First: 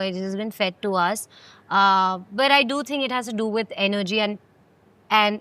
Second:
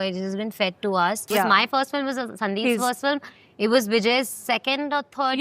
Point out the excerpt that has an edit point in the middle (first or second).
second